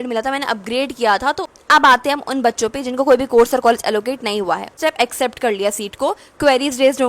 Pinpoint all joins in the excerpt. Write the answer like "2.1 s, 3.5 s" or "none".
1.5 s, 4.8 s